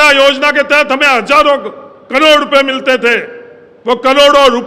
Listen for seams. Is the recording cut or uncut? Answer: uncut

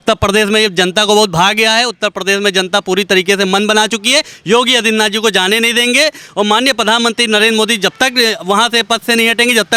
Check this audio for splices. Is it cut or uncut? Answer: uncut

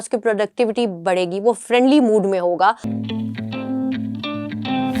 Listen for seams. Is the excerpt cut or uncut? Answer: cut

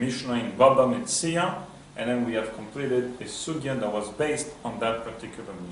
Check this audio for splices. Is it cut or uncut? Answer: uncut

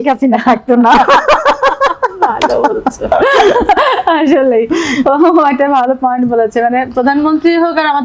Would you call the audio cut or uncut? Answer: uncut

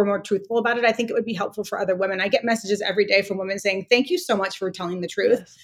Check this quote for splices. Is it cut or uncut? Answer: uncut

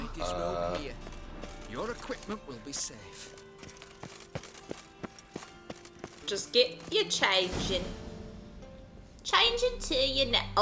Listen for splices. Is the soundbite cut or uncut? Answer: uncut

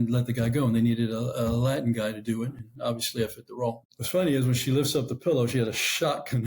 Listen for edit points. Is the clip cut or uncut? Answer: cut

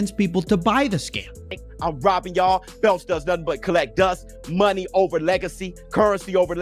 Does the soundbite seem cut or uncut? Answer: cut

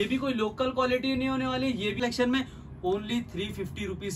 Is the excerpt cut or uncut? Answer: cut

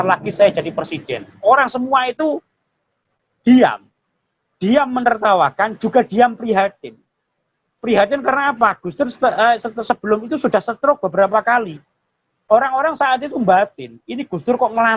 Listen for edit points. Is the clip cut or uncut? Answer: uncut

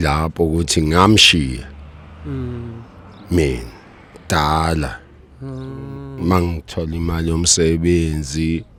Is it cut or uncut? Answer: uncut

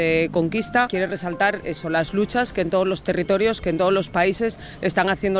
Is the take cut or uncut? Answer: uncut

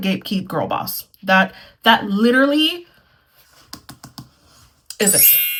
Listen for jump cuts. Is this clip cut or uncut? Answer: uncut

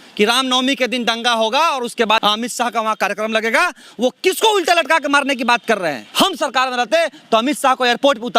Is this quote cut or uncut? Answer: cut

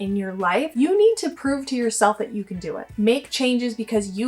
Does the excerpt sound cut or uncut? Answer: cut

